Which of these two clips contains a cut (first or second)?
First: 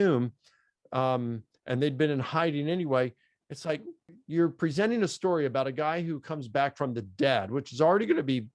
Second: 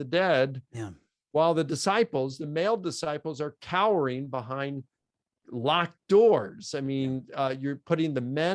first